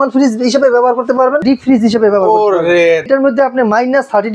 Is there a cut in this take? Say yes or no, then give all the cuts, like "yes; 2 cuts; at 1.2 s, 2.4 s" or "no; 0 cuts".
yes; 2 cuts; at 1.4 s, 3.1 s